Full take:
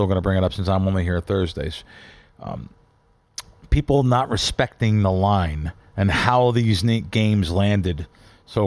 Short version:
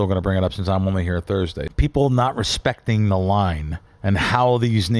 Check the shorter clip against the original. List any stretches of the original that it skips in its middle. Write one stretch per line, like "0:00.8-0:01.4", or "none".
0:01.7-0:03.6